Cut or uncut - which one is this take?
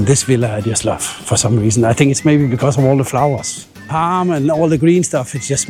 uncut